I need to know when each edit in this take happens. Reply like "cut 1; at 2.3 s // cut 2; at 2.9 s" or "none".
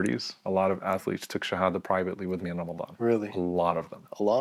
none